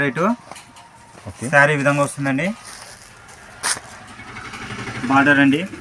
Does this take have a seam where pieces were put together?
no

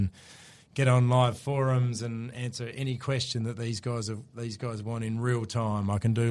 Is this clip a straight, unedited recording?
yes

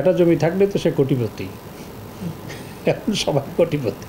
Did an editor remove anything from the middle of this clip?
no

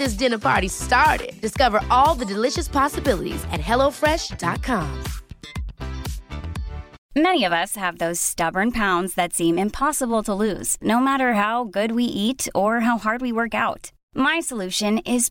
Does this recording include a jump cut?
yes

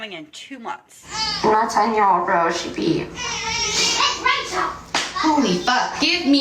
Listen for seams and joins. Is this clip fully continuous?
no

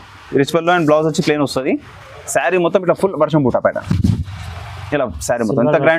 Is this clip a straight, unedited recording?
yes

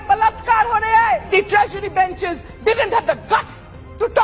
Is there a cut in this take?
yes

